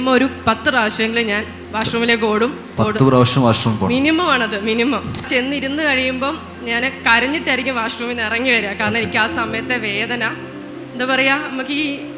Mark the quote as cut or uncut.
cut